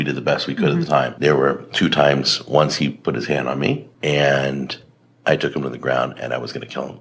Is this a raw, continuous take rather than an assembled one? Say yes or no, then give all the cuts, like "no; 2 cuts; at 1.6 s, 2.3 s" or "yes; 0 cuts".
no; 2 cuts; at 1.1 s, 3.9 s